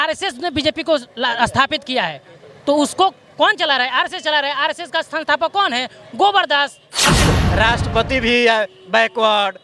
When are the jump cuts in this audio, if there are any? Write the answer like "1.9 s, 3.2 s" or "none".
7.2 s